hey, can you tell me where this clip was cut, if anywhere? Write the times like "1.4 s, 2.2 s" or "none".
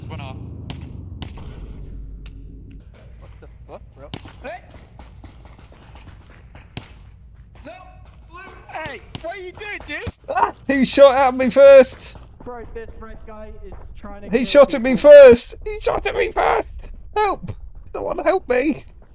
2.8 s, 13.9 s